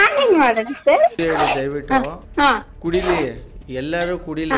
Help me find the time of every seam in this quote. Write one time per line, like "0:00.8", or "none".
0:01.2